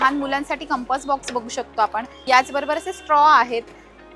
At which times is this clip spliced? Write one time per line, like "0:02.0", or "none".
0:02.1